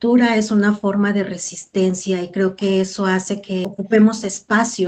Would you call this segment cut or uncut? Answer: cut